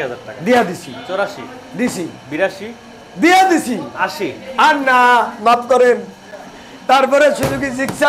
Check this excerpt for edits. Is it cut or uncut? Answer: uncut